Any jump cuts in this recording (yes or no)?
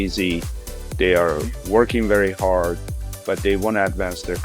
no